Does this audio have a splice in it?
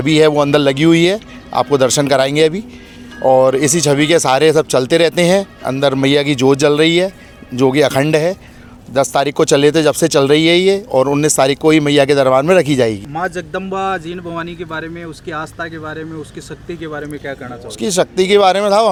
no; 0 cuts

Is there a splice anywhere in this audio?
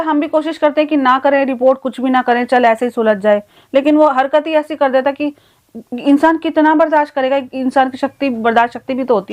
no; 0 cuts

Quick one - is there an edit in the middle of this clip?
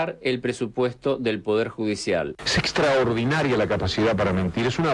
yes; 1 cut; at 2.3 s

